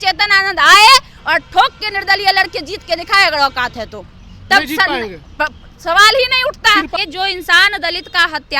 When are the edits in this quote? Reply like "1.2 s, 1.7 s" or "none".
7.0 s